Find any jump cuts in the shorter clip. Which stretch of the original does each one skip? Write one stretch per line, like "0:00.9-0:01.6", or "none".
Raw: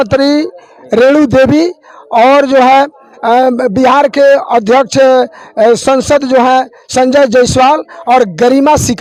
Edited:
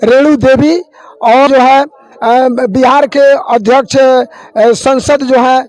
0:02.4-0:02.5